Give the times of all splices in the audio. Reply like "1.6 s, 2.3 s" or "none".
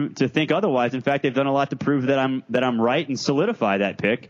none

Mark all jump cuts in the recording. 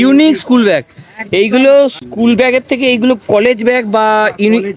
2.0 s

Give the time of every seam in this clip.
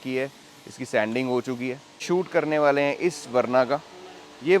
1.9 s

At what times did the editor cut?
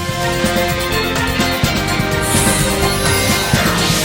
none

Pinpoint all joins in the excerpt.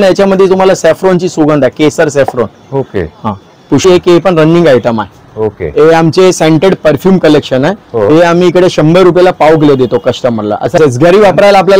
3.8 s, 10.8 s

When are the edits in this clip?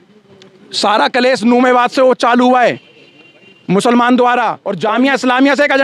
4.6 s

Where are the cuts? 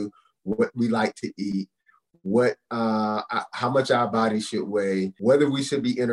5.1 s

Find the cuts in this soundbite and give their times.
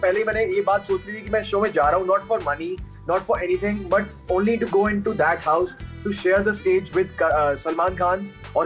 none

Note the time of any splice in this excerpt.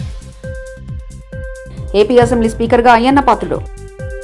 1.7 s

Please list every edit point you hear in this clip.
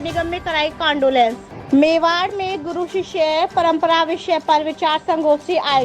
1.5 s

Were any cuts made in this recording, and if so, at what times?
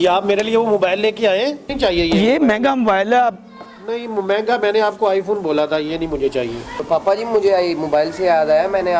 1.7 s, 6.9 s

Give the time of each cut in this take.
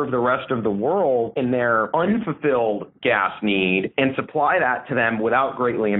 none

